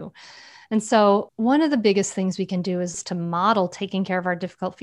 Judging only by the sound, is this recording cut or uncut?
cut